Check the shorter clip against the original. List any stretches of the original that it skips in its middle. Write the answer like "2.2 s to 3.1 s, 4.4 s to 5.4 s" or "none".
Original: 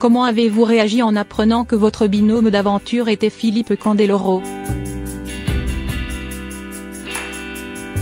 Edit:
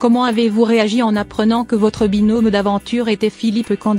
none

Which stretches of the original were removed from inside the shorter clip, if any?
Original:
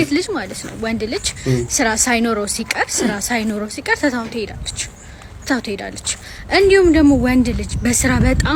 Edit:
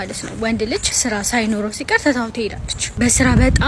1.4 s to 3.0 s, 4.8 s to 7.7 s

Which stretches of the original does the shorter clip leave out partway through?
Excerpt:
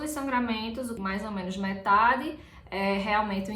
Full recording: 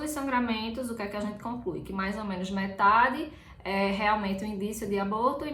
1.0 s to 1.9 s

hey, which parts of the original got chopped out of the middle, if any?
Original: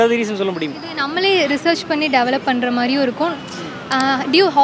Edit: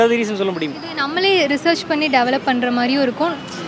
none

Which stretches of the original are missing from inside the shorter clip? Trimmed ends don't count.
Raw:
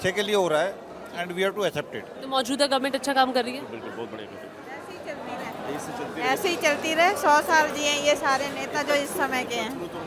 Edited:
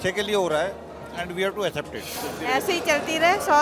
2.1 s to 5.9 s

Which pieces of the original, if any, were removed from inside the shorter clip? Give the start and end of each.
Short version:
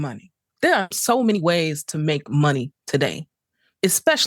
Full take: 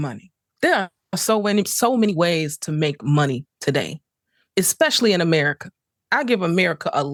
1.0 s to 1.7 s

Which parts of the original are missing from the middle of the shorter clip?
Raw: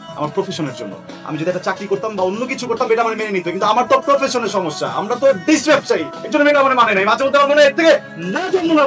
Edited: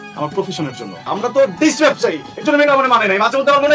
1.0 s to 4.9 s

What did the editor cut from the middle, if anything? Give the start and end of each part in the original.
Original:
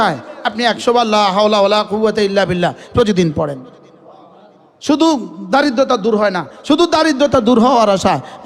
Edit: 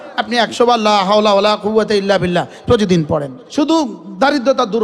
3.6 s to 4.7 s

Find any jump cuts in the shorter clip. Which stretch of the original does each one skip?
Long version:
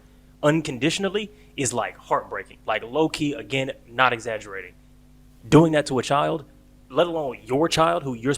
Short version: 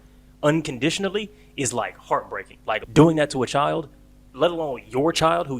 2.9 s to 5.4 s

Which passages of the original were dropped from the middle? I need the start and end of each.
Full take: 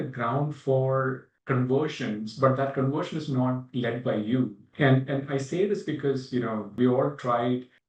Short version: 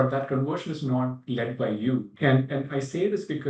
4.6 s to 4.7 s

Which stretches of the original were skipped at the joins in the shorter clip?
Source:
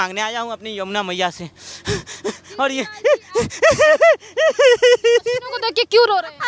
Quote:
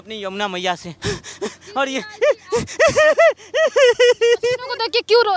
1.4 s to 1.7 s

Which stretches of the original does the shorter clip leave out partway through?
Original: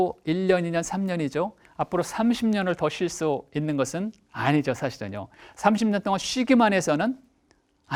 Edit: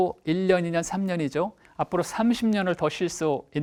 none

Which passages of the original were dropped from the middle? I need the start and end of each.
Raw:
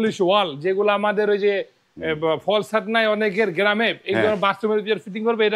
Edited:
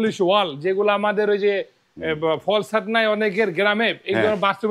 none

